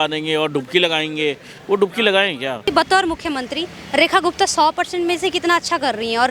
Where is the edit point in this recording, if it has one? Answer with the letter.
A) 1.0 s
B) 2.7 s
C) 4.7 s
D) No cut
B